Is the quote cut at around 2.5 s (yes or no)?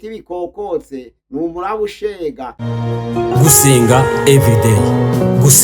yes